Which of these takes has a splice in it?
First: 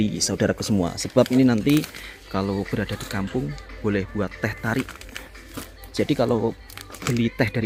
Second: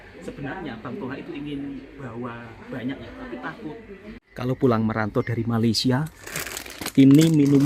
second; 1 cut; at 4.2 s

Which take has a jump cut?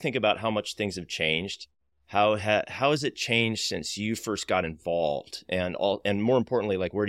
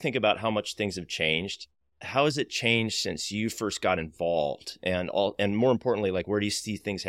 second; 1 cut; at 2.0 s

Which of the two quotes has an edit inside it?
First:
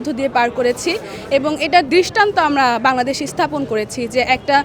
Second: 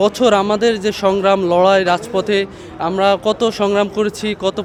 first; 1 cut; at 1.9 s

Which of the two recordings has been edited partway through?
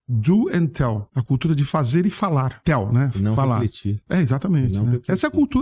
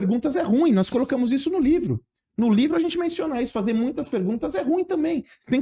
first; 2 cuts; at 1.1 s, 2.6 s

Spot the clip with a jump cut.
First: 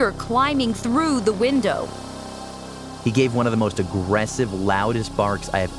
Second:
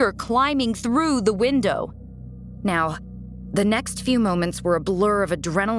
first; 1 cut; at 2.5 s

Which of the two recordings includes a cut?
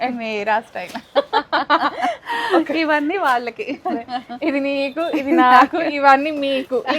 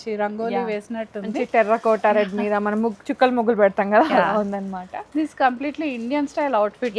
first; 1 cut; at 5.7 s

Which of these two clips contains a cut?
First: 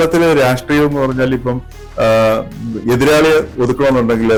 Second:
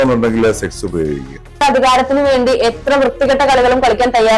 second; 1 cut; at 1.6 s

